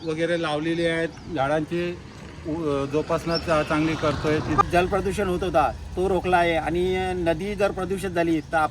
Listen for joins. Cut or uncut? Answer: cut